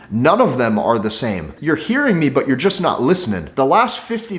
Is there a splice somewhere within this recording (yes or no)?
yes